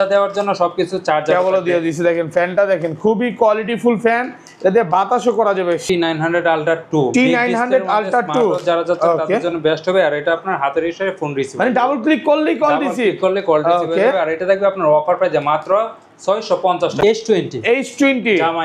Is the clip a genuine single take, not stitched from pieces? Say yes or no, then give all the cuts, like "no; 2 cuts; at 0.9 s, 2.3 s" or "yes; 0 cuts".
no; 2 cuts; at 5.8 s, 17.0 s